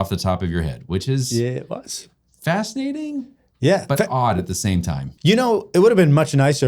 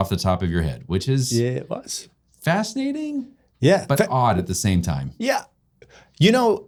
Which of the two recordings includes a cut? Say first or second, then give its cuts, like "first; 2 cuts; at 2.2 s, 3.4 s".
first; 1 cut; at 5.0 s